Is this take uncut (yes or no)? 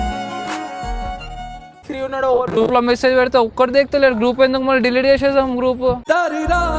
no